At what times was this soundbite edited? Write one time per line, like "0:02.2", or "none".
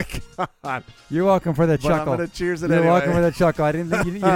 0:00.9